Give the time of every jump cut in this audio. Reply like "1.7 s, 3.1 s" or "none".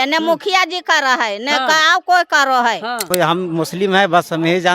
3.1 s